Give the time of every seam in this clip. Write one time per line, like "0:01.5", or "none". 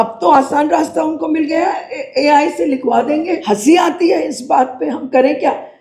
0:03.4